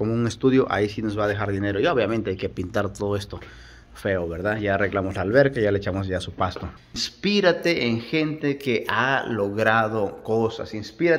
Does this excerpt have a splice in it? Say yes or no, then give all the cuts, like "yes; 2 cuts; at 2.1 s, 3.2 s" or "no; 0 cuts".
yes; 1 cut; at 7.1 s